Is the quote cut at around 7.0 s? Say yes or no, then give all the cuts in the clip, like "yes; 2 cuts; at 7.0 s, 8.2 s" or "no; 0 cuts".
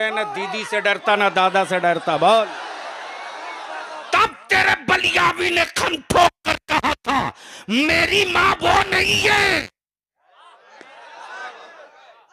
no; 1 cut; at 4.0 s